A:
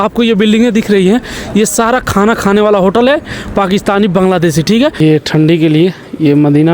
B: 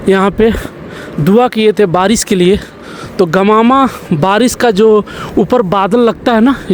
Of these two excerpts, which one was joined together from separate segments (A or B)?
A